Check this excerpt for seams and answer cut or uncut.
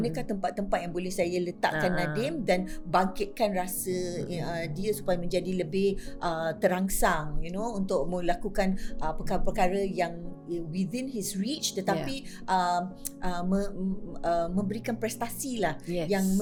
uncut